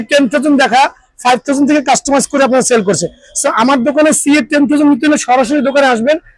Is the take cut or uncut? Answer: uncut